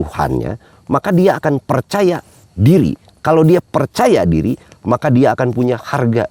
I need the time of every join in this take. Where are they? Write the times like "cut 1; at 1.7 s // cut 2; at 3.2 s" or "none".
cut 1; at 3.1 s